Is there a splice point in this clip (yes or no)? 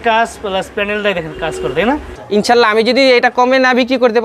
yes